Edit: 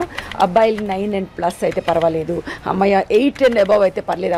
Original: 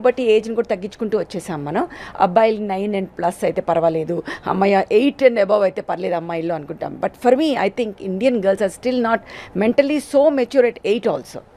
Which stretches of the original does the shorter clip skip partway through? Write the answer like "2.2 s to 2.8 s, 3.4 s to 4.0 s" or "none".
none